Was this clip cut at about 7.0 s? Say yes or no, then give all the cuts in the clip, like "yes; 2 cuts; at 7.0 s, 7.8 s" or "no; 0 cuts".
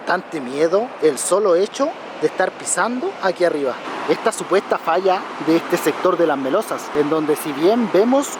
no; 1 cut; at 3.8 s